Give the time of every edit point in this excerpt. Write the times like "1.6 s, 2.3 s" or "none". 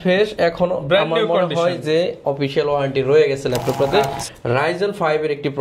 4.2 s